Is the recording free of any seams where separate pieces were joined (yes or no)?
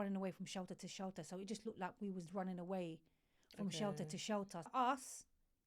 no